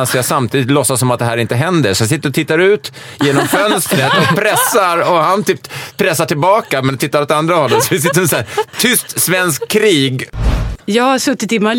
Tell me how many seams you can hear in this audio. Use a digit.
2